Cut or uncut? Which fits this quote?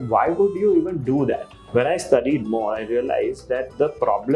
cut